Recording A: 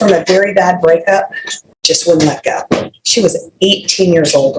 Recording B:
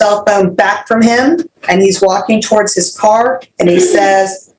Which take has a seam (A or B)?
B